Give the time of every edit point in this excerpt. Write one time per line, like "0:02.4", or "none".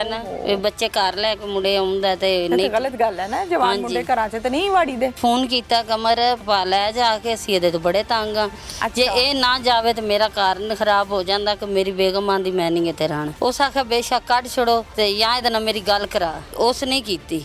0:05.2
0:06.4
0:13.3
0:14.9
0:16.5